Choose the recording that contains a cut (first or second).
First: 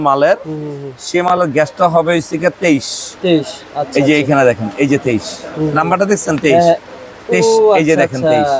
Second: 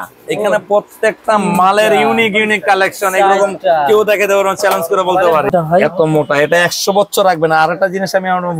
second